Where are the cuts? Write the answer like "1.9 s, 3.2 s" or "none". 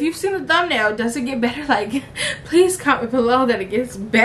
none